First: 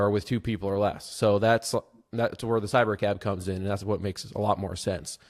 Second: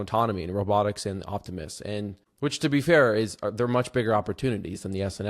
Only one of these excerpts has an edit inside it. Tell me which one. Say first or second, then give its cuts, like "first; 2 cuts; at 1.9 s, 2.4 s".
second; 1 cut; at 2.2 s